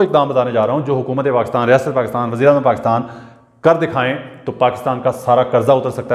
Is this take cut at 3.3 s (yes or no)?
no